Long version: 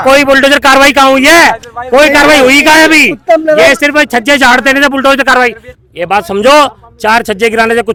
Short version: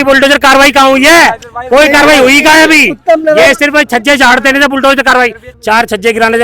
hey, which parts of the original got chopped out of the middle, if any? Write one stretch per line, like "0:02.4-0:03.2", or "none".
0:05.7-0:06.9

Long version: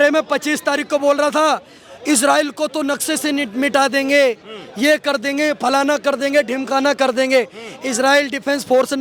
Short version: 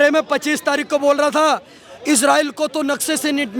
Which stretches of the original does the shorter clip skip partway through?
none

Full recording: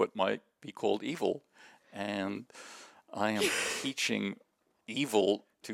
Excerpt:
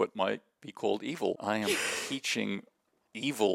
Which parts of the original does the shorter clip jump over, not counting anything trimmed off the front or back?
0:01.4-0:03.1

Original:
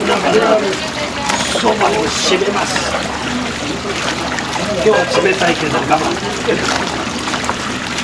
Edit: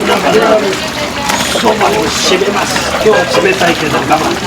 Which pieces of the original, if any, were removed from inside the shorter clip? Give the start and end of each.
0:03.0-0:04.8

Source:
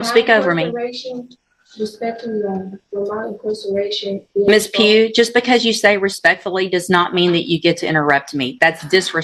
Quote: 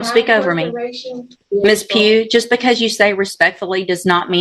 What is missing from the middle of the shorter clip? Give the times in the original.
0:01.3-0:04.2

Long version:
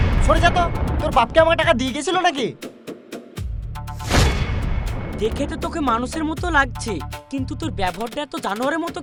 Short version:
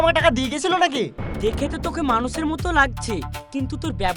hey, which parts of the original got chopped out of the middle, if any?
0:02.6-0:05.0

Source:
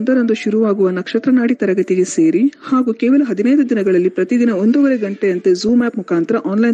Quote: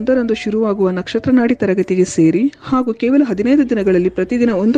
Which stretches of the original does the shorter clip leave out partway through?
none

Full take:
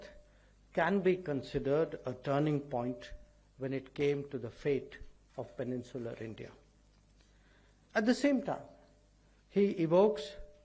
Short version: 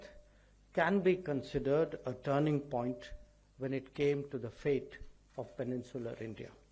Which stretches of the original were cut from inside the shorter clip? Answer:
none

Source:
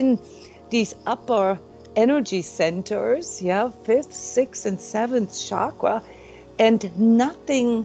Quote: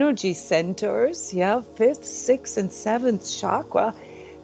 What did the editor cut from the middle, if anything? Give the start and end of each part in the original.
none

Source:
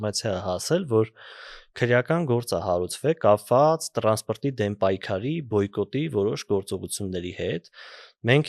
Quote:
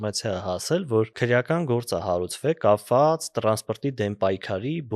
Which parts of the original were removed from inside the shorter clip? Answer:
0:01.1-0:01.7

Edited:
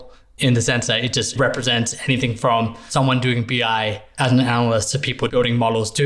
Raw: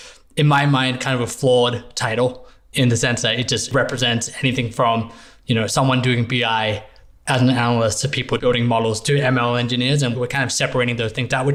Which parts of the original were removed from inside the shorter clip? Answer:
0:05.2-0:05.7
0:06.8-0:07.1

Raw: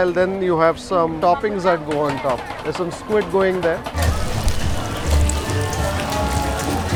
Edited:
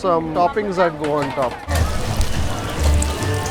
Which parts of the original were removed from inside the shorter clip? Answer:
0:02.5-0:03.9

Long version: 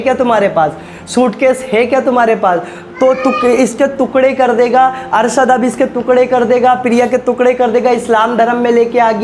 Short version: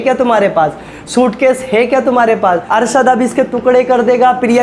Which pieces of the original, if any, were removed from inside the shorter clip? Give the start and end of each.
0:02.6-0:05.1

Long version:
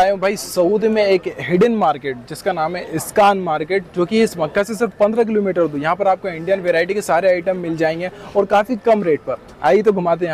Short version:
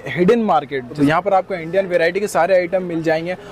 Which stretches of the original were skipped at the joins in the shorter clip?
0:02.3-0:05.7

